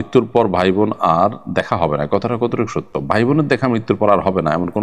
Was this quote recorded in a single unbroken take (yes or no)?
yes